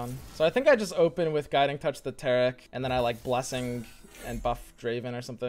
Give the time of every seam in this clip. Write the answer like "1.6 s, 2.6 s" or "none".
2.7 s